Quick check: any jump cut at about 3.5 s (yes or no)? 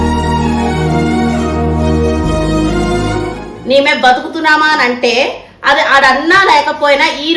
yes